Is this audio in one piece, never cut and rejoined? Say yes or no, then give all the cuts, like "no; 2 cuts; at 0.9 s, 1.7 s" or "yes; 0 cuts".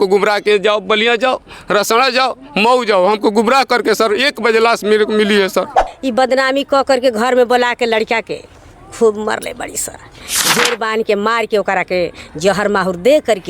no; 2 cuts; at 5.9 s, 10.3 s